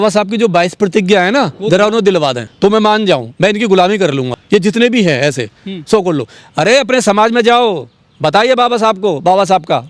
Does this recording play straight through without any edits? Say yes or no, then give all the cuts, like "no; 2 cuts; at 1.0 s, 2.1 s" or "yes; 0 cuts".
no; 2 cuts; at 2.4 s, 4.3 s